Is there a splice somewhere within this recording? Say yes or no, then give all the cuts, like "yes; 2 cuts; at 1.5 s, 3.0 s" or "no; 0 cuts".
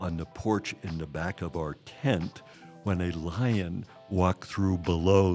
no; 0 cuts